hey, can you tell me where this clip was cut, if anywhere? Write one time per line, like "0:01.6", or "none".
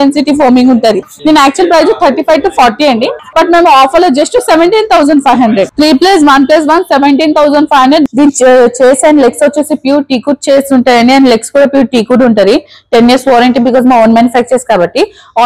0:08.1